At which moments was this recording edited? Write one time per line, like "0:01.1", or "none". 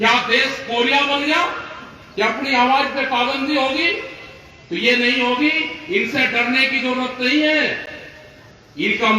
none